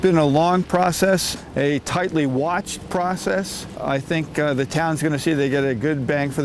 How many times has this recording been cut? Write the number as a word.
two